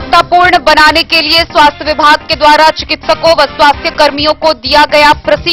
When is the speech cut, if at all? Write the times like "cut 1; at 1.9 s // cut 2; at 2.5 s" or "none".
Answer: none